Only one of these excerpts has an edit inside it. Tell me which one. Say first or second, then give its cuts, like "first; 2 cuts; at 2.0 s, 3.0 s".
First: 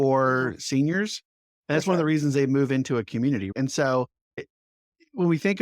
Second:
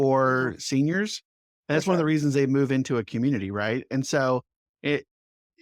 first; 2 cuts; at 3.5 s, 4.5 s